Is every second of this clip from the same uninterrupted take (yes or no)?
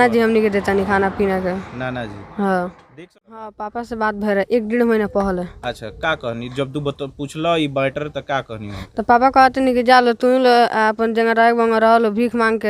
no